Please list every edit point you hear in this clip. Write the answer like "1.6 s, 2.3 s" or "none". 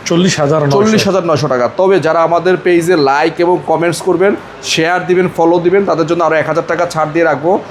none